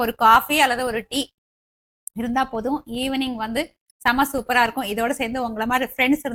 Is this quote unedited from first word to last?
yes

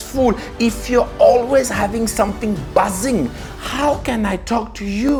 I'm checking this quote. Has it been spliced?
no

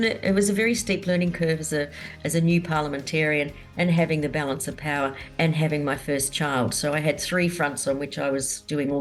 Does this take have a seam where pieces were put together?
no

